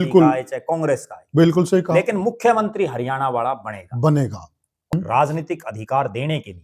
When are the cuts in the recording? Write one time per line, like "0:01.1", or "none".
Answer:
0:04.9